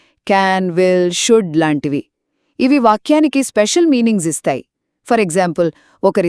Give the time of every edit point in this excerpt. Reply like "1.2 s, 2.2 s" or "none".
none